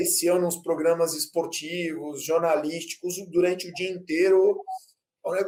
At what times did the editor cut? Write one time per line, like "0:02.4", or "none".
none